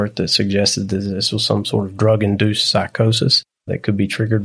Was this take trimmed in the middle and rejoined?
yes; 1 cut; at 3.5 s

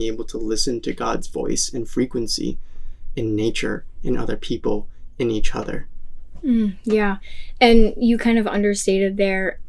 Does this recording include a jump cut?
no; 0 cuts

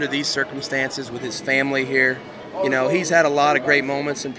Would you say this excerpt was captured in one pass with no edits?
no; 1 cut; at 2.4 s

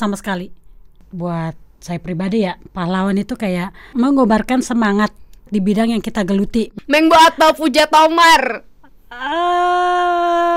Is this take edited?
yes; 4 cuts; at 1.1 s, 3.9 s, 5.5 s, 6.7 s

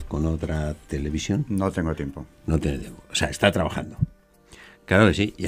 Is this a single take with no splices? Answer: yes; 0 cuts

